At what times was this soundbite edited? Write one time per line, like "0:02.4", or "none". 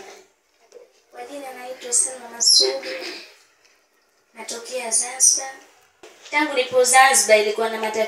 0:06.2